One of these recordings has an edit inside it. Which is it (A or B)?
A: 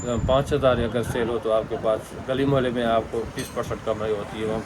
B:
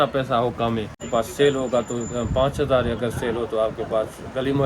B